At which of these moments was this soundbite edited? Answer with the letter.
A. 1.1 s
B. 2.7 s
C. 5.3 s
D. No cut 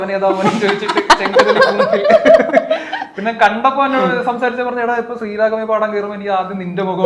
D